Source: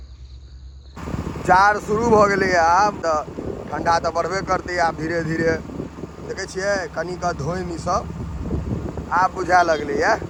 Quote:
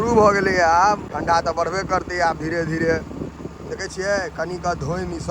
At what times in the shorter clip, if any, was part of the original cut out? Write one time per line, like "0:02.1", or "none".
0:01.0